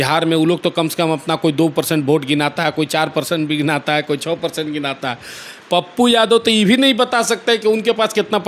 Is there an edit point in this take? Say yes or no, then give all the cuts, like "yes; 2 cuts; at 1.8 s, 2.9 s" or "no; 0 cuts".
no; 0 cuts